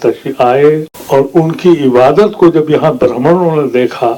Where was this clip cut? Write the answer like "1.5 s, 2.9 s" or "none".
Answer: 0.9 s